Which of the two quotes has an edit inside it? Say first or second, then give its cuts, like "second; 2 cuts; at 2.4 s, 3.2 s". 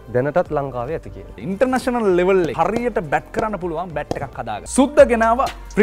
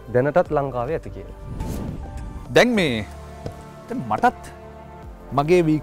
first; 3 cuts; at 1.4 s, 2.5 s, 4.6 s